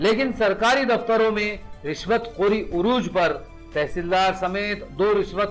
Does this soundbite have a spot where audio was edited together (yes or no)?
no